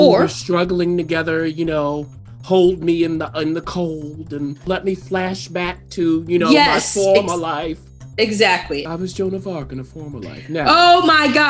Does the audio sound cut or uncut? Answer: cut